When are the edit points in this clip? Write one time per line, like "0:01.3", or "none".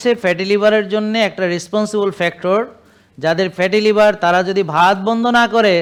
none